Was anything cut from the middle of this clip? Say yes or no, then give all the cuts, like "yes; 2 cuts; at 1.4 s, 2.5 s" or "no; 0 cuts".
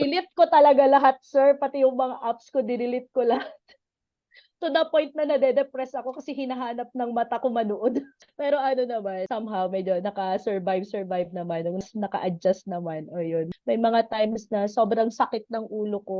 yes; 3 cuts; at 9.2 s, 11.8 s, 13.5 s